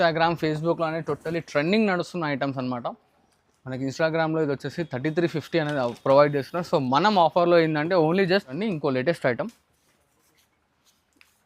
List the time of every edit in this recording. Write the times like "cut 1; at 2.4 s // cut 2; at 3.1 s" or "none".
cut 1; at 8.6 s